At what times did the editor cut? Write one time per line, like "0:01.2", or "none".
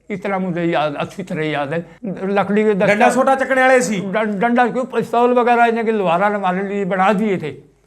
0:01.9